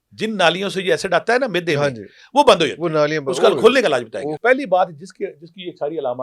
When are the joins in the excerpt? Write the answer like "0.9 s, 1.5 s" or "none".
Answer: 4.4 s